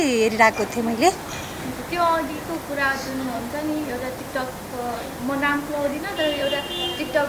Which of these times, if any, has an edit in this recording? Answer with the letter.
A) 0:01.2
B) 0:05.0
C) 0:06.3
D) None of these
D